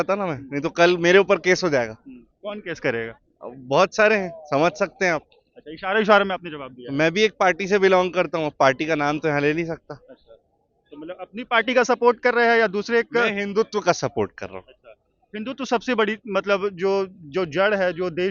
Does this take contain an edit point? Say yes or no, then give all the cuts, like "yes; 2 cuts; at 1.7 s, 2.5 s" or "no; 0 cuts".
no; 0 cuts